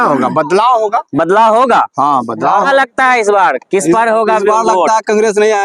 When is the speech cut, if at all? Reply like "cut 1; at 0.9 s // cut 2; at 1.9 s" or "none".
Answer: cut 1; at 2.7 s